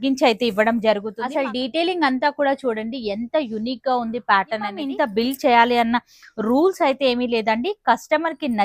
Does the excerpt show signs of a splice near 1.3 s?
yes; 2 cuts; at 1.3 s, 4.8 s

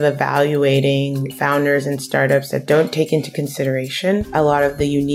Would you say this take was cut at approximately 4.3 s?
yes; 2 cuts; at 1.3 s, 4.3 s

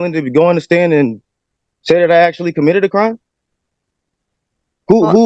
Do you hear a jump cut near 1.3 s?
no; 0 cuts

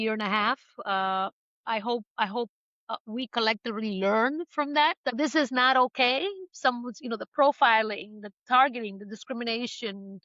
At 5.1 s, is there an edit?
yes; 1 cut; at 5.1 s

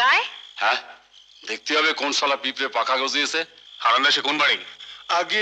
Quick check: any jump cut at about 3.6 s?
yes; 1 cut; at 3.6 s

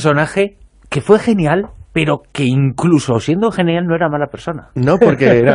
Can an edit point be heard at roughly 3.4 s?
yes; 1 cut; at 3.4 s

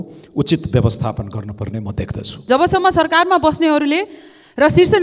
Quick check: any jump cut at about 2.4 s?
yes; 1 cut; at 2.4 s

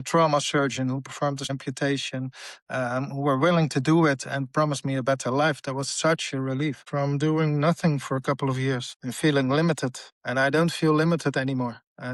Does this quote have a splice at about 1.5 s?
yes; 2 cuts; at 1.5 s, 6.8 s

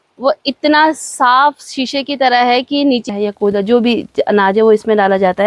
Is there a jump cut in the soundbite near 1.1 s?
no; 1 cut; at 3.0 s

